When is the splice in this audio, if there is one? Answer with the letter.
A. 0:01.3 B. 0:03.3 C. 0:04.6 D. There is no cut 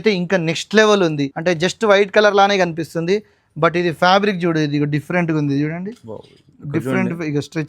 A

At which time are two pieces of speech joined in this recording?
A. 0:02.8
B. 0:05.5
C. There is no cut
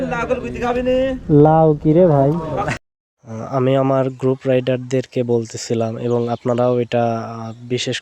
A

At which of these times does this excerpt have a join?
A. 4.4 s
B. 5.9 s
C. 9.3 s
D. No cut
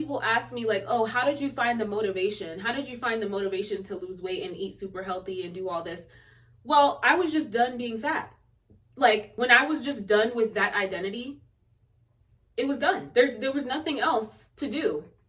C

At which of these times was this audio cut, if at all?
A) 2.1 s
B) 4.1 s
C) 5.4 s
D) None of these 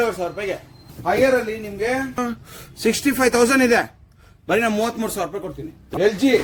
C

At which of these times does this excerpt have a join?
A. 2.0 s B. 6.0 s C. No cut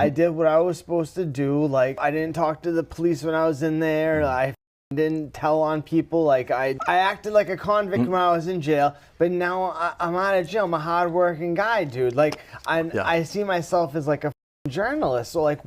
A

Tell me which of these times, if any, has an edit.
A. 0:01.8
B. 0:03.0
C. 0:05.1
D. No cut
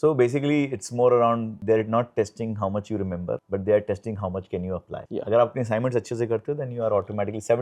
D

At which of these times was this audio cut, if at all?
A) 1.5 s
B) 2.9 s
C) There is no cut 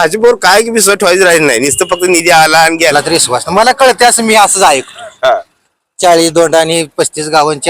B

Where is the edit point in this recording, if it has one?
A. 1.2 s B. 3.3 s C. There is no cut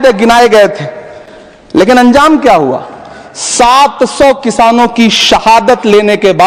C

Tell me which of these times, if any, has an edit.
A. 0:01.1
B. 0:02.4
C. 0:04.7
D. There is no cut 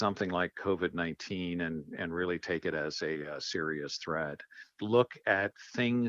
C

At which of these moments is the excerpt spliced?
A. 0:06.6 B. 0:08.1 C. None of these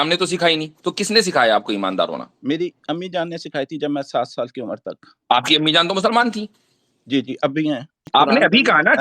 B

